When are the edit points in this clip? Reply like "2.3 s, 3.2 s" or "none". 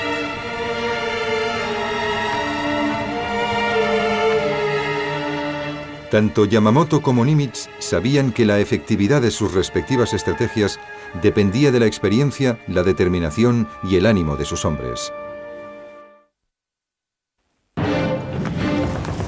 8.9 s